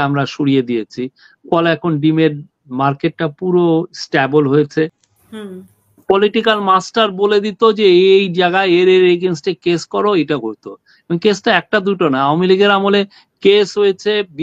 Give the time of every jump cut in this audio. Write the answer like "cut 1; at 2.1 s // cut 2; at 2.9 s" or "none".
cut 1; at 5.1 s